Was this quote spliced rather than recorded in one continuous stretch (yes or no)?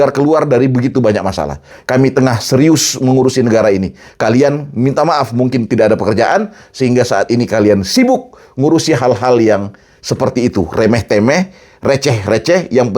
yes